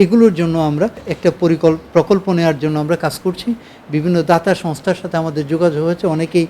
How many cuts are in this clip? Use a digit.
1